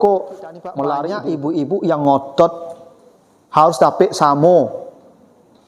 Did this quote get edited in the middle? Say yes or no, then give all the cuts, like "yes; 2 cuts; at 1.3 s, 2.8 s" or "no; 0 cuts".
yes; 1 cut; at 1.1 s